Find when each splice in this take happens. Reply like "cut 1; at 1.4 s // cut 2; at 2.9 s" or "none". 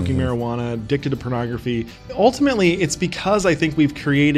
cut 1; at 2.0 s